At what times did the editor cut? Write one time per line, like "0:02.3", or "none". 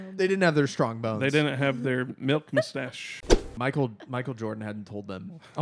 0:03.2